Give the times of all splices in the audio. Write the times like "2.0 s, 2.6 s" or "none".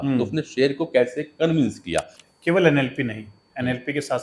2.2 s